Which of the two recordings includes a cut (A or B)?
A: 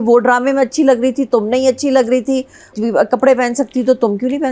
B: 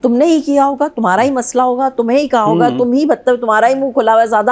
A